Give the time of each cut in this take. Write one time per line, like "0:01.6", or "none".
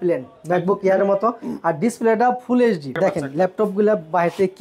0:02.9

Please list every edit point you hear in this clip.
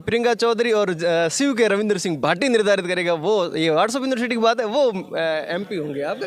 none

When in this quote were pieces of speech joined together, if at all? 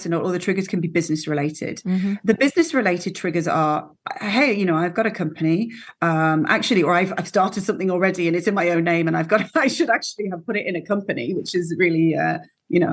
none

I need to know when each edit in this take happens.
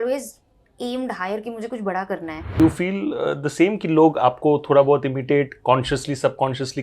0:02.6

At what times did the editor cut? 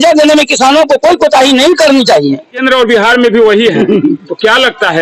none

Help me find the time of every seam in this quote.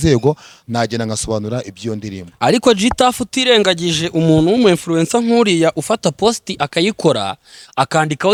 none

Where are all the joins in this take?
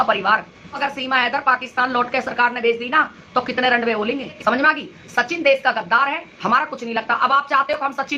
0:00.8
0:04.3

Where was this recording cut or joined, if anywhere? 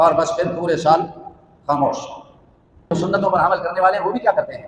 0:02.9

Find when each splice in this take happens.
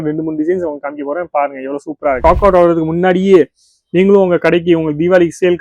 0:02.2

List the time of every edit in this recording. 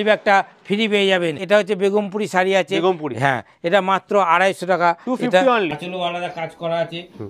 0:01.4
0:05.7

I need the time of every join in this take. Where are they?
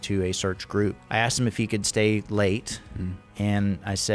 0:01.0

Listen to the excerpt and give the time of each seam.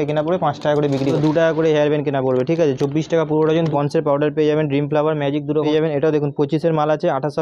0:01.2
0:03.7
0:05.7

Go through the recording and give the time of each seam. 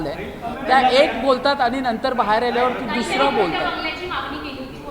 none

